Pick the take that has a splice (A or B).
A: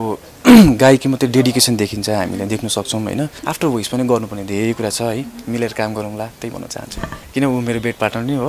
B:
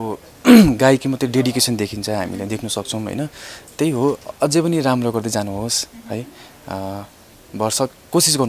A